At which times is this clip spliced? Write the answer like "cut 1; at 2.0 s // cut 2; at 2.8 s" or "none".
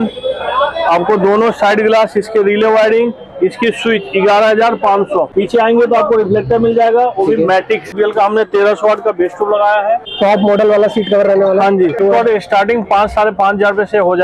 cut 1; at 5.3 s // cut 2; at 7.9 s // cut 3; at 10.1 s // cut 4; at 12.0 s